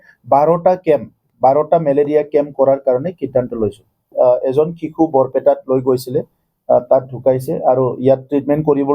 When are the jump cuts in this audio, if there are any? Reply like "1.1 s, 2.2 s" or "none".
4.1 s